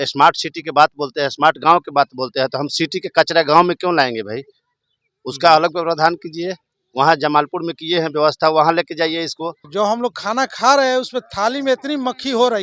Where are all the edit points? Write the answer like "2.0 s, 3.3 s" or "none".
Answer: 9.6 s